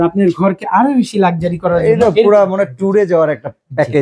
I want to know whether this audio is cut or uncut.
uncut